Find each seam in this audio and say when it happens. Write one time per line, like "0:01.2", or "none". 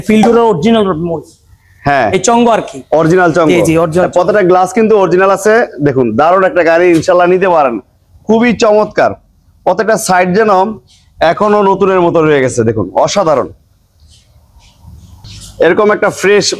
none